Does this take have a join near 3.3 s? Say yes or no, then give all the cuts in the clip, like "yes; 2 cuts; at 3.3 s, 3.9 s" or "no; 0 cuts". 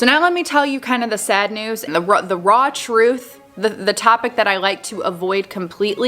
no; 1 cut; at 1.8 s